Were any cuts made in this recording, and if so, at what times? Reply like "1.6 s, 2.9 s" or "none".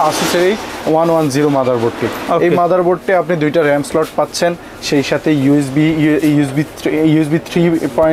none